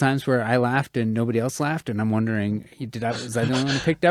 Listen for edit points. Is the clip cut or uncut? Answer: uncut